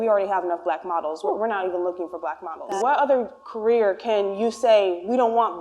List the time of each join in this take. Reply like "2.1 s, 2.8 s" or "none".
2.8 s